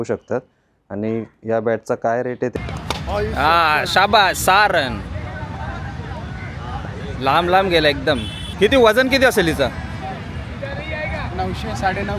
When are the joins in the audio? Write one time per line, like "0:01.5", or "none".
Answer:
0:02.5
0:08.4